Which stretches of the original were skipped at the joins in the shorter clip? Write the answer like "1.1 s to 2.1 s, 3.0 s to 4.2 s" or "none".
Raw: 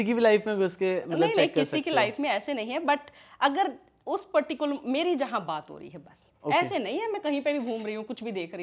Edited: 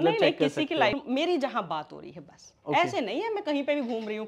2.1 s to 4.7 s